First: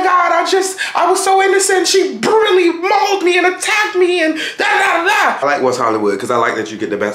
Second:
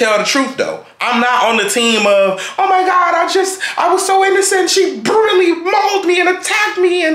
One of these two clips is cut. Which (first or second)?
first